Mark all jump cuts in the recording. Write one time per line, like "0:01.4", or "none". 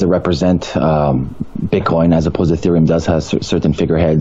none